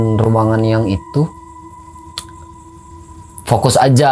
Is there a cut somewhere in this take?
no; 0 cuts

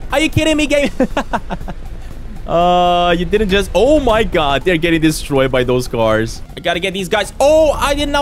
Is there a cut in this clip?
yes; 1 cut; at 6.4 s

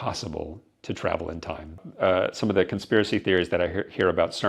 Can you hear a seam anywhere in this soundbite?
yes; 1 cut; at 1.8 s

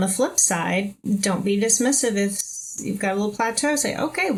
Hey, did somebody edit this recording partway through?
no; 0 cuts

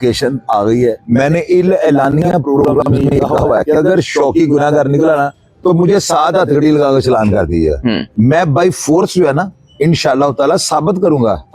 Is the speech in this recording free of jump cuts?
no; 2 cuts; at 1.0 s, 8.0 s

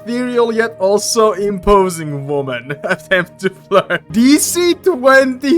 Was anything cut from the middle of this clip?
yes; 1 cut; at 4.1 s

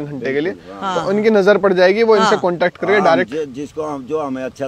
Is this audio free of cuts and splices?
yes; 0 cuts

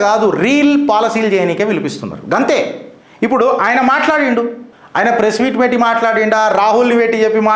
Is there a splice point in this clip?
no; 0 cuts

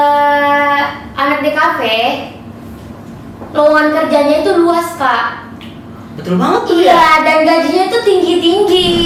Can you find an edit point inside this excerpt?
no; 0 cuts

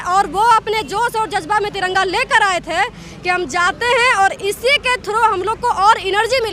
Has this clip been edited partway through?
no; 0 cuts

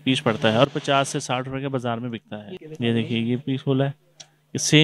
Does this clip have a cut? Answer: yes; 1 cut; at 2.6 s

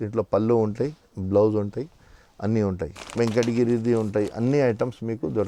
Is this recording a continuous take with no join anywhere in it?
no; 1 cut; at 3.0 s

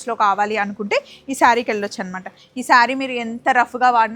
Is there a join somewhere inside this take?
no; 0 cuts

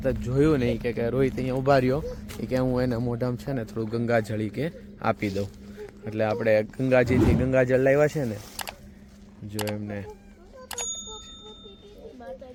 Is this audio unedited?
yes; 0 cuts

